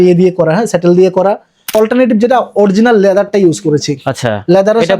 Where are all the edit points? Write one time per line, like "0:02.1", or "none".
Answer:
0:01.6

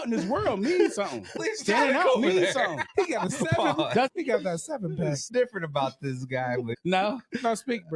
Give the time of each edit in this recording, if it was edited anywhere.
0:01.4
0:02.8
0:04.1
0:05.2
0:06.7

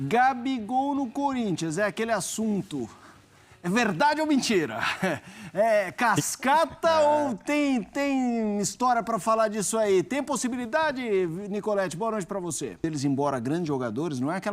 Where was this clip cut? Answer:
0:12.8

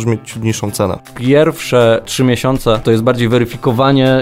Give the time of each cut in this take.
0:01.1
0:02.3

